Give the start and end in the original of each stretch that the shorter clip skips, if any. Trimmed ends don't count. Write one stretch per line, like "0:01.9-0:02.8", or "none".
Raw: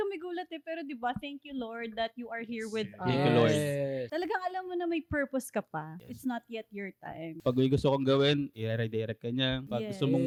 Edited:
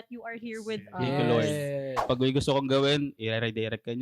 0:04.0-0:07.3